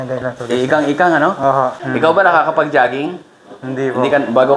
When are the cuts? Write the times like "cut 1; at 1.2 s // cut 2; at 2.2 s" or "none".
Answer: cut 1; at 1.7 s